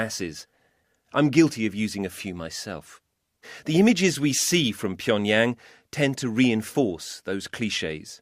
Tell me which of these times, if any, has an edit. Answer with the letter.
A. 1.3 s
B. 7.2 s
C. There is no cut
C